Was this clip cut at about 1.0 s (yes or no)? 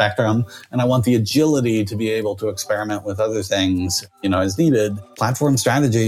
no